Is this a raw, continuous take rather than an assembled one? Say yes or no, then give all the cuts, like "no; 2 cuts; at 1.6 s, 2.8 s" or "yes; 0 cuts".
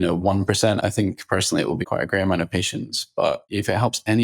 no; 3 cuts; at 0.8 s, 1.8 s, 3.5 s